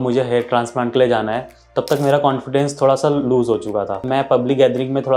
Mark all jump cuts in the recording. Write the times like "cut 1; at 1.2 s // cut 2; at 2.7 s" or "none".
cut 1; at 4.0 s